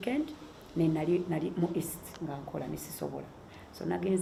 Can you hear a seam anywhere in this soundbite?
no; 0 cuts

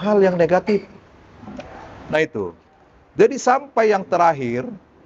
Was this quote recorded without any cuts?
yes; 0 cuts

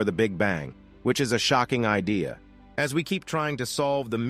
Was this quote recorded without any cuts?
no; 1 cut; at 2.7 s

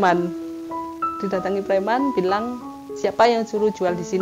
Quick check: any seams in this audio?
no; 0 cuts

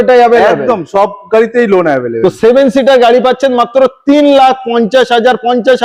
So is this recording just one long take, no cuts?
yes; 0 cuts

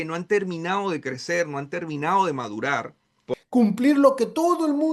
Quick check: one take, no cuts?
no; 1 cut; at 3.2 s

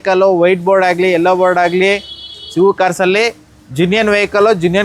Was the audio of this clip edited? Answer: no; 0 cuts

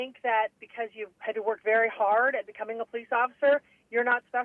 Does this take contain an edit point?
yes; 1 cut; at 1.1 s

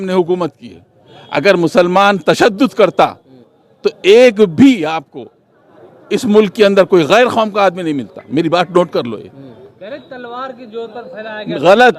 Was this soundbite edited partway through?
no; 0 cuts

